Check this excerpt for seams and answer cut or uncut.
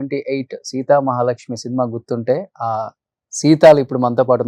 uncut